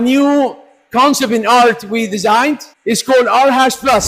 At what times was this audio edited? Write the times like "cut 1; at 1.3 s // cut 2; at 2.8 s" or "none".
cut 1; at 2.7 s